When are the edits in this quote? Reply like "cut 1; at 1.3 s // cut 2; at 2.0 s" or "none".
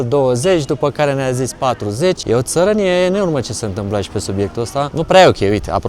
cut 1; at 2.2 s // cut 2; at 4.9 s